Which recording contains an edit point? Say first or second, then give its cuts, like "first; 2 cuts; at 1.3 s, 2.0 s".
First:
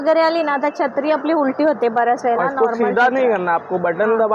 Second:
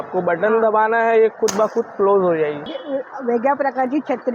second; 1 cut; at 2.7 s